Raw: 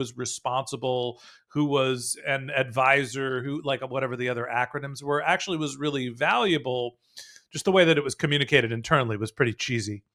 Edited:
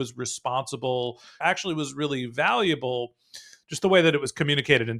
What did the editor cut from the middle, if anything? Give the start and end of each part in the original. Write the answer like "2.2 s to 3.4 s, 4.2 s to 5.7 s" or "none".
1.4 s to 5.2 s